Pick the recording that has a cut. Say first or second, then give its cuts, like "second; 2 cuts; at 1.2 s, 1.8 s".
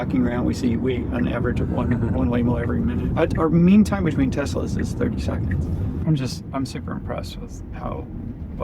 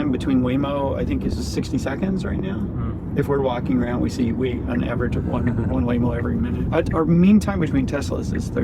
first; 1 cut; at 6.0 s